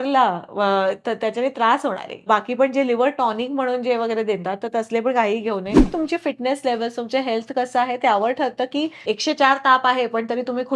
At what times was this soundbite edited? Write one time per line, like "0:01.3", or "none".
0:02.1
0:05.9
0:09.0

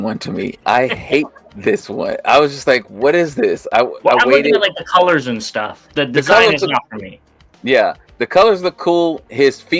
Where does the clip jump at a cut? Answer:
none

